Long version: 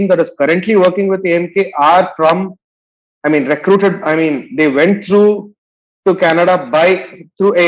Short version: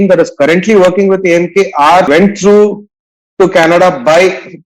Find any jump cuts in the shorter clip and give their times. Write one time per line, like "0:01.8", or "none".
0:02.1